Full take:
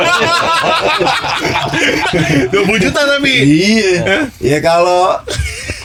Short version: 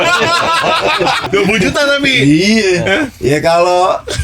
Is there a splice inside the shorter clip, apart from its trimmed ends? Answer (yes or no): yes